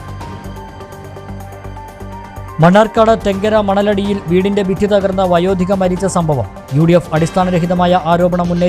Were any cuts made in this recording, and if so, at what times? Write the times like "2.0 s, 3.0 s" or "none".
1.2 s